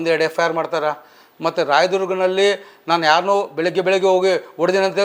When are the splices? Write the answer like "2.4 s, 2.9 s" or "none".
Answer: none